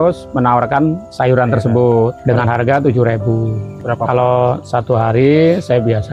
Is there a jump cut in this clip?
yes; 3 cuts; at 1.1 s, 2.2 s, 3.7 s

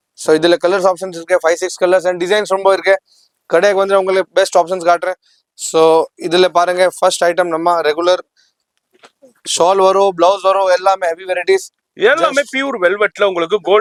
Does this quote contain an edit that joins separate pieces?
no; 0 cuts

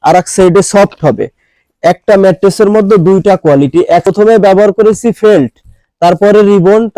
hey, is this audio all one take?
no; 2 cuts; at 1.6 s, 4.1 s

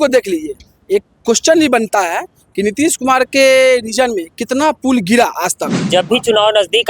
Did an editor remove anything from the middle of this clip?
yes; 1 cut; at 5.9 s

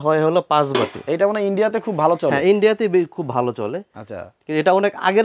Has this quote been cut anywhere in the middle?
no; 0 cuts

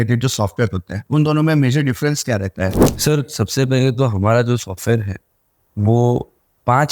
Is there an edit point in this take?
yes; 2 cuts; at 0.9 s, 2.9 s

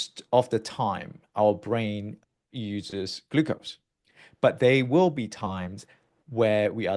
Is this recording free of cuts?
yes; 0 cuts

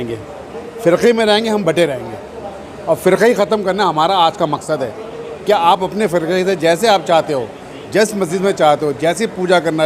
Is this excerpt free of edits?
yes; 0 cuts

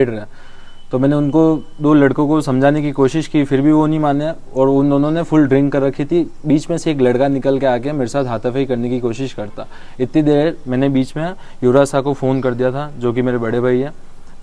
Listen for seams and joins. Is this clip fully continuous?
yes; 0 cuts

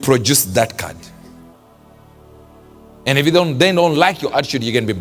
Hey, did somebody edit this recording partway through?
yes; 2 cuts; at 1.0 s, 2.3 s

